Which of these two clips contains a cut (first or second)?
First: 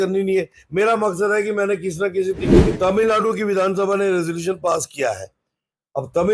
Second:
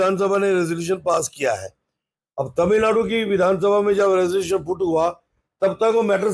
first